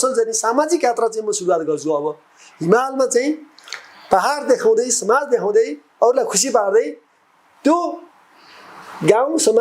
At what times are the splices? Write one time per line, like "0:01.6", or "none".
none